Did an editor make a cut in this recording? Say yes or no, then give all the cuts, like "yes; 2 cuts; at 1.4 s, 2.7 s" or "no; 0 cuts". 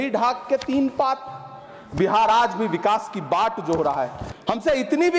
yes; 1 cut; at 4.2 s